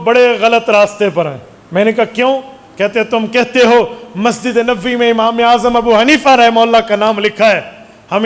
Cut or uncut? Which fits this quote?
uncut